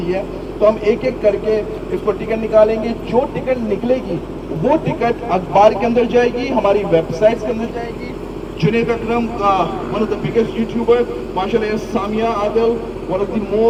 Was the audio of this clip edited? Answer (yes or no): no